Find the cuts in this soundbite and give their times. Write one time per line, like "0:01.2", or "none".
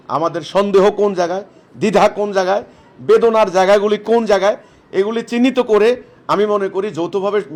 none